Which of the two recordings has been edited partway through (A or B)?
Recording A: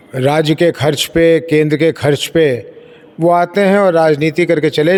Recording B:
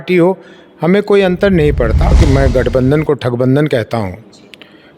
B